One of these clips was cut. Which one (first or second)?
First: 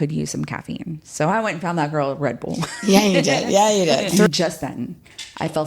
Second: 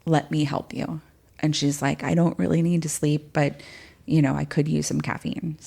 first